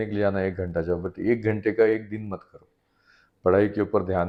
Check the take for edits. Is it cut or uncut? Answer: uncut